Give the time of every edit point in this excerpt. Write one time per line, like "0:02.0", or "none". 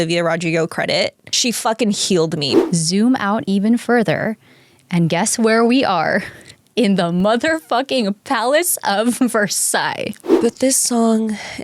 0:01.2
0:02.6
0:10.2